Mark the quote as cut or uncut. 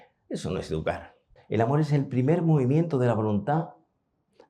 cut